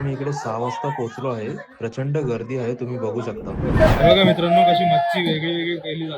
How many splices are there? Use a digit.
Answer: 1